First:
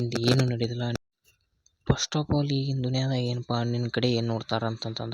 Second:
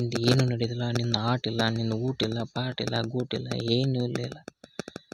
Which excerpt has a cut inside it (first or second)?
first